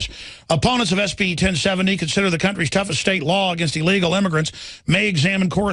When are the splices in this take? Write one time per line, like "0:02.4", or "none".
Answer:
0:04.0